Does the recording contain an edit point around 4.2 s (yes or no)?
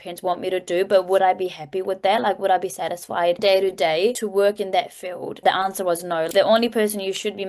yes